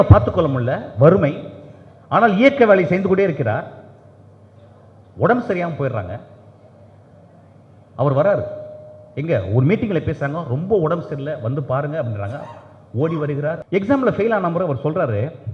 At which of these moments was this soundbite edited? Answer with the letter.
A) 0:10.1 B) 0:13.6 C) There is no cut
B